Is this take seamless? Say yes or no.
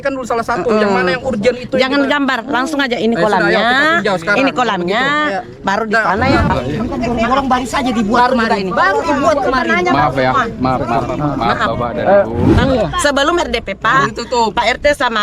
no